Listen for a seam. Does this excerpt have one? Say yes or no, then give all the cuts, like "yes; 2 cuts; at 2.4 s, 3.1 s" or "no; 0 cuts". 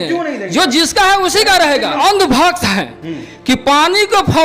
yes; 1 cut; at 1.9 s